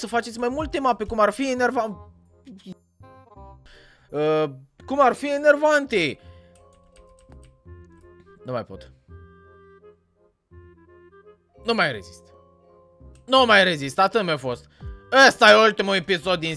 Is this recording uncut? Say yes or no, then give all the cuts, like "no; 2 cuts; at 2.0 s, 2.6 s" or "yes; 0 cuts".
yes; 0 cuts